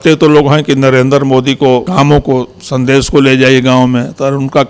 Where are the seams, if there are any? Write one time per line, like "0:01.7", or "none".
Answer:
0:01.9